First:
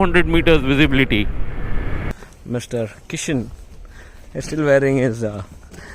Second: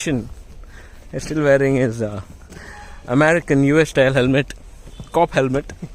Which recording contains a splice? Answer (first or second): first